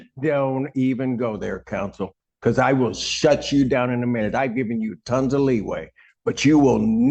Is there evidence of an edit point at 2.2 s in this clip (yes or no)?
yes